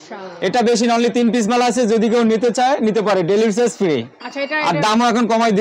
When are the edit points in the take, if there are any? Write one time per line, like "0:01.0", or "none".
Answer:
none